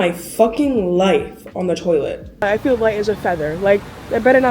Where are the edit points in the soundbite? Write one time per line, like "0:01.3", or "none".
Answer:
0:02.4